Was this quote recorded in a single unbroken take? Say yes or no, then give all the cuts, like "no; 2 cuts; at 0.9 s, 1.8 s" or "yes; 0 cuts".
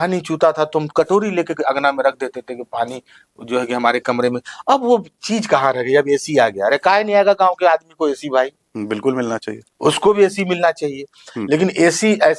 yes; 0 cuts